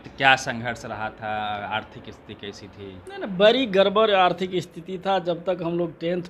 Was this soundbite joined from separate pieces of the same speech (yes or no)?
no